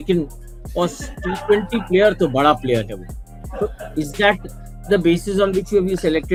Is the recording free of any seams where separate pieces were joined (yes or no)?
yes